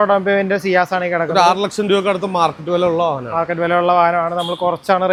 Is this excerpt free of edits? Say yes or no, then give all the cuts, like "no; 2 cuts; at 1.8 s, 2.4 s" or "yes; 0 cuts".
yes; 0 cuts